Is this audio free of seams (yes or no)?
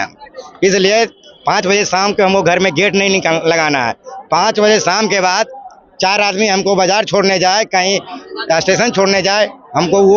yes